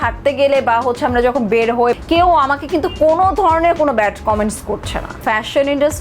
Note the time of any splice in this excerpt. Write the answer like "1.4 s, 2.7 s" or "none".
2.0 s, 5.2 s